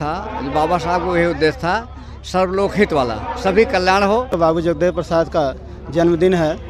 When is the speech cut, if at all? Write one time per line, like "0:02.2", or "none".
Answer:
0:04.3